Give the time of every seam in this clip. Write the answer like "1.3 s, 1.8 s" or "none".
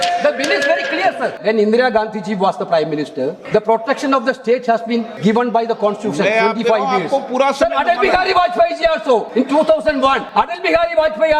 1.4 s, 3.4 s, 5.1 s, 9.3 s, 10.2 s